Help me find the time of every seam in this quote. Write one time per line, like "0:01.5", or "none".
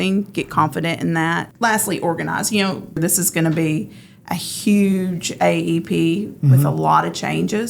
0:01.5
0:03.0